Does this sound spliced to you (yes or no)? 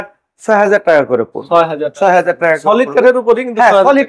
no